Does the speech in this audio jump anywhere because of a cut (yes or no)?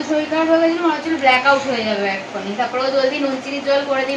no